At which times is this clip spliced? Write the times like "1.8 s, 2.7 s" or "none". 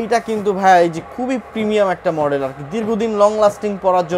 none